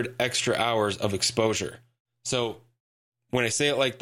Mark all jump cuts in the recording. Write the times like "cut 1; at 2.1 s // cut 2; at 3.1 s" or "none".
none